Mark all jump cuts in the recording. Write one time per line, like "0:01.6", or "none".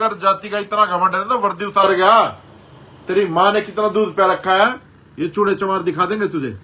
none